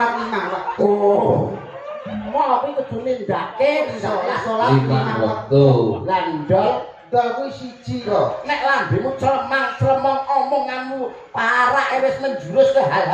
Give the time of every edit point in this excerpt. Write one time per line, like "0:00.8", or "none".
0:08.1